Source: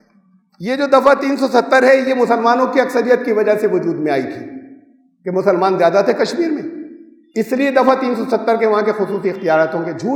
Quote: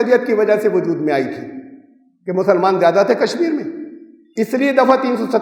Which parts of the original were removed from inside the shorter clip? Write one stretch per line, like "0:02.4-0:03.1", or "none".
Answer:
none